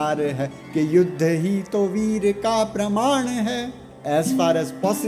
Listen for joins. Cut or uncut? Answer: cut